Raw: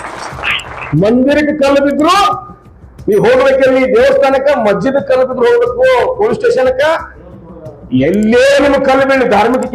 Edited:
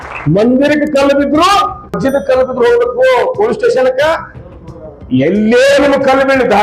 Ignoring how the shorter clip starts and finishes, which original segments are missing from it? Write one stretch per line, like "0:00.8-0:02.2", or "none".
0:02.7-0:04.8